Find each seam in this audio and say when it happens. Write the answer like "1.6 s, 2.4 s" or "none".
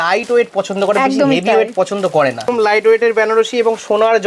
2.5 s